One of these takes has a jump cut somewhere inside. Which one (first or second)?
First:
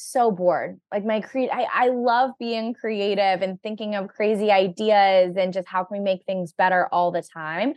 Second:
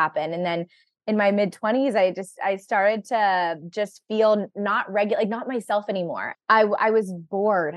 second